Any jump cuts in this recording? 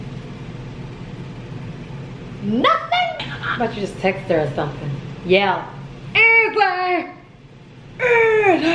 yes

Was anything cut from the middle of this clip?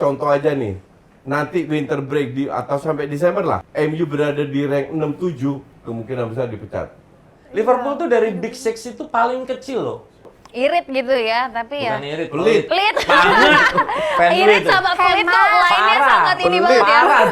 yes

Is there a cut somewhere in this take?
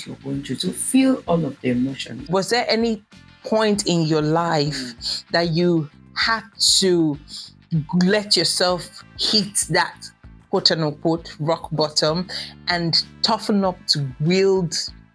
yes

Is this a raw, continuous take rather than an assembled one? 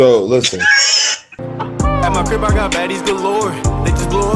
no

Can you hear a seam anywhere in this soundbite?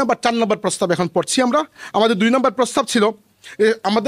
no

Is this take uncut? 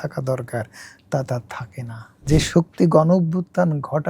no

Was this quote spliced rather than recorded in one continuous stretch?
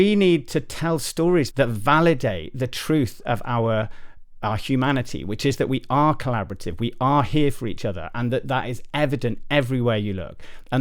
yes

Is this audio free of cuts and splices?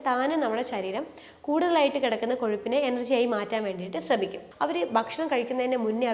no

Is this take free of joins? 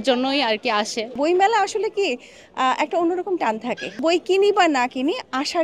no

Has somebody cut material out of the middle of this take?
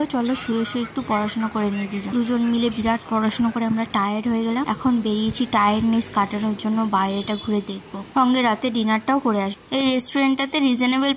no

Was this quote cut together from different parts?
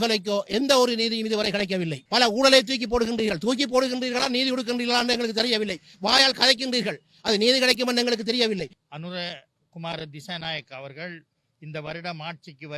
yes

